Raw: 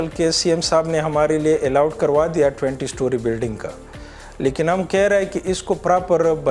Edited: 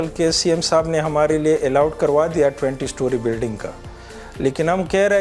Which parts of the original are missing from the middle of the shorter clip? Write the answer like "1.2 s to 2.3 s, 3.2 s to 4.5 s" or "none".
none

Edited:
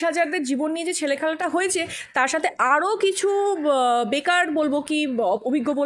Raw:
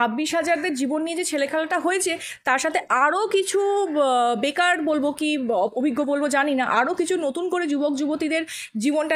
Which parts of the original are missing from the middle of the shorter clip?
none

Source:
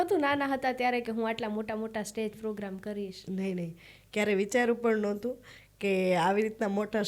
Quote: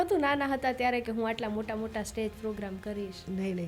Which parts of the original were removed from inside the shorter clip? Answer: none

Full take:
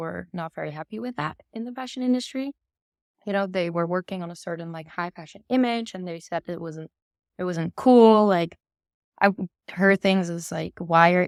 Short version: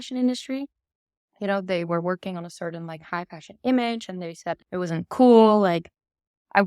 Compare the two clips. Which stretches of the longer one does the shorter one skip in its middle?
6.5 s to 7.3 s

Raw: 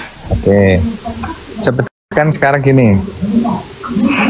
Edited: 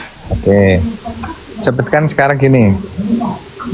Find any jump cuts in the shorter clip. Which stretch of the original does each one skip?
1.9 s to 2.1 s

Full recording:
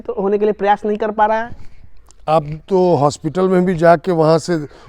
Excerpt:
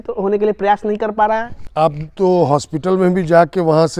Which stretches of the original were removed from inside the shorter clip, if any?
1.6 s to 2.1 s

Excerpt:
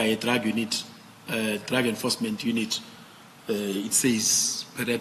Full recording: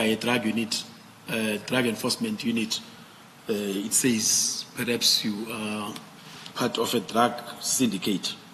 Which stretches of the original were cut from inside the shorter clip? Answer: none

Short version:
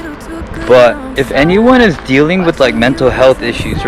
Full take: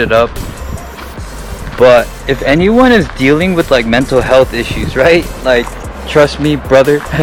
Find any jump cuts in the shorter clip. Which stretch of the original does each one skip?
none

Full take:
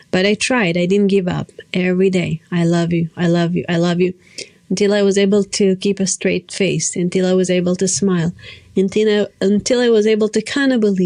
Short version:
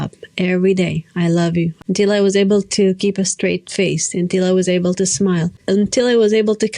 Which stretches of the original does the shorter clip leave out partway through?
3.1 s to 4.6 s, 8.4 s to 9.3 s

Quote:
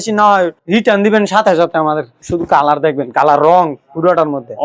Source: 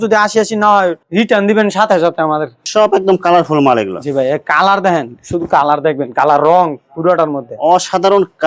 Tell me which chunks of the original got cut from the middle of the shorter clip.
2.6 s to 5.2 s

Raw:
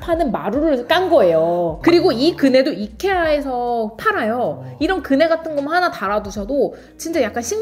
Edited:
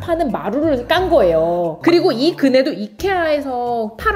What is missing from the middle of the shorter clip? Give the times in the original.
none

